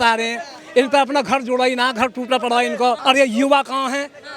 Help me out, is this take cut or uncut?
cut